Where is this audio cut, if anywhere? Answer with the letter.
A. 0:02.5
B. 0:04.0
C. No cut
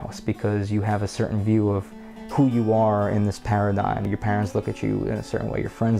B